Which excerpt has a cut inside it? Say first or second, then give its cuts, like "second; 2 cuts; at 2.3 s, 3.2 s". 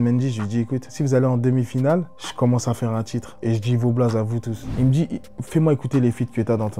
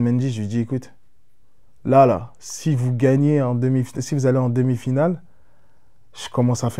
first; 4 cuts; at 0.9 s, 2.2 s, 3.2 s, 4.6 s